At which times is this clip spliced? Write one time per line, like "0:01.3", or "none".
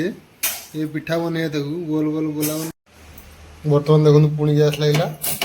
0:02.5